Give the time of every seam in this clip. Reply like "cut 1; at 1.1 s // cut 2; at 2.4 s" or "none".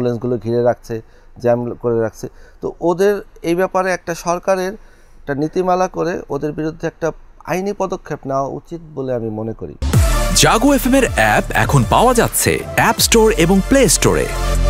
cut 1; at 9.7 s